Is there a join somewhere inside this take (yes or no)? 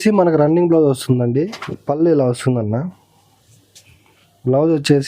yes